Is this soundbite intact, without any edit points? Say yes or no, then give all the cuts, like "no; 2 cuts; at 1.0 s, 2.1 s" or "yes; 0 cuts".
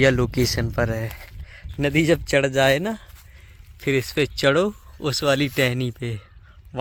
yes; 0 cuts